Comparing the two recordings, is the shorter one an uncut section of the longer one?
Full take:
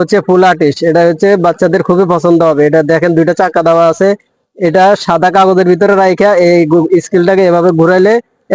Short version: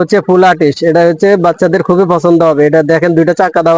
yes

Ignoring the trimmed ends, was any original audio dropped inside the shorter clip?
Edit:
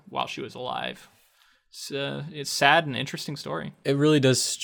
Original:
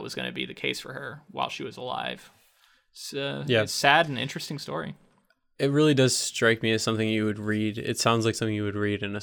yes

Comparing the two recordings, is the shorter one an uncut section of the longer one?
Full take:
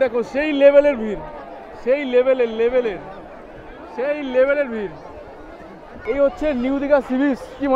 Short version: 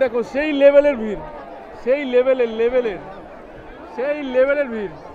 yes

